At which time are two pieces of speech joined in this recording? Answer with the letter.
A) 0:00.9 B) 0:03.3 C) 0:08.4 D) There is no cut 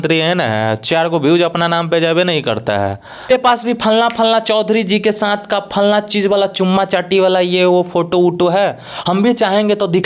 B